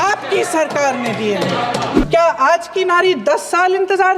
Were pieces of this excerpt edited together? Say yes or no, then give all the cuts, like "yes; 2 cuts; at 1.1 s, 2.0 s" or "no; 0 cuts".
yes; 1 cut; at 2.0 s